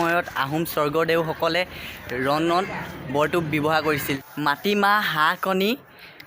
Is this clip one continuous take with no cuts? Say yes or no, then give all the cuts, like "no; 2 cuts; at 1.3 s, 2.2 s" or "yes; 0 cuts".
no; 1 cut; at 4.0 s